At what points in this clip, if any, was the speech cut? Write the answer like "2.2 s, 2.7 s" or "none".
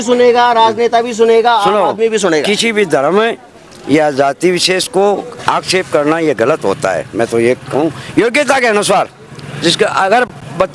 none